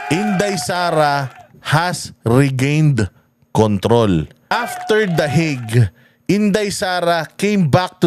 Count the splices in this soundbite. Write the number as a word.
one